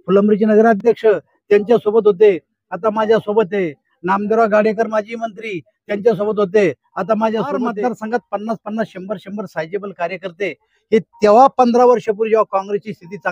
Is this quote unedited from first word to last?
no; 1 cut; at 7.7 s

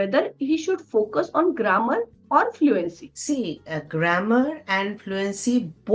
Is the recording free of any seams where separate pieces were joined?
yes; 0 cuts

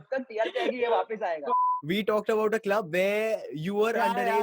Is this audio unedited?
no; 1 cut; at 1.5 s

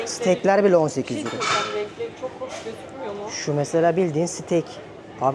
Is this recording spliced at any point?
no; 0 cuts

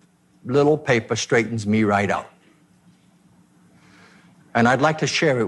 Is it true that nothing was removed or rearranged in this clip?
yes; 0 cuts

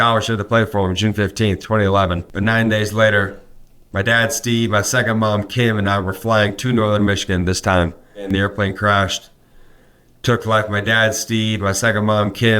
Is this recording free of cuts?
no; 2 cuts; at 2.3 s, 8.3 s

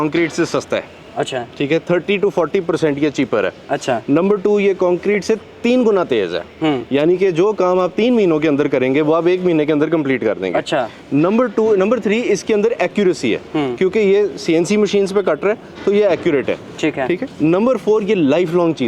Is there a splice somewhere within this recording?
no; 0 cuts

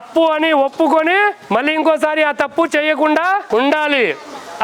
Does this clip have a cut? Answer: yes; 2 cuts; at 1.4 s, 3.4 s

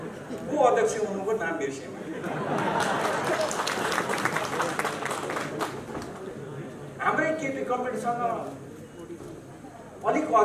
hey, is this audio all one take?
no; 1 cut; at 6.3 s

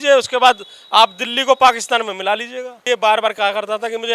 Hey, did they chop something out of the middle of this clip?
yes; 1 cut; at 2.8 s

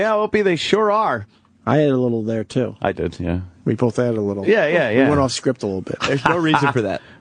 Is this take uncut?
no; 1 cut; at 2.4 s

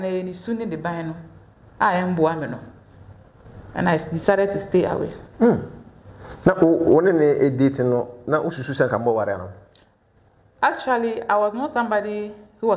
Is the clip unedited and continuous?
yes; 0 cuts

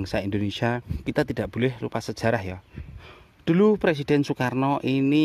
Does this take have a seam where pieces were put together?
yes; 1 cut; at 0.9 s

